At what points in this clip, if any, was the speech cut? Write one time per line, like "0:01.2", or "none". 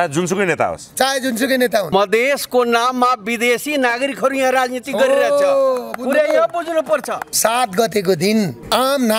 0:01.9
0:07.2